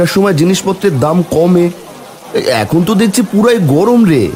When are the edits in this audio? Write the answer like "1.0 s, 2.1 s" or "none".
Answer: none